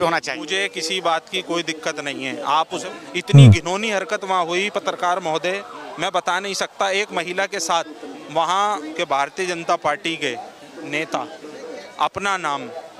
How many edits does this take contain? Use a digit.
2